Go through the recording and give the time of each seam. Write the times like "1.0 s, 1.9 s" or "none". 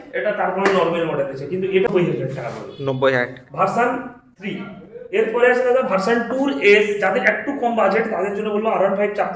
1.9 s